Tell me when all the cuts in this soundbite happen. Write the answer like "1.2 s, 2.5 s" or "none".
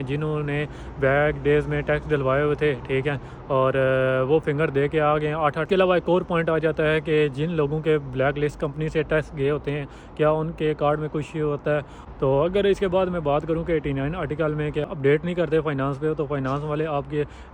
5.6 s, 12.0 s, 14.8 s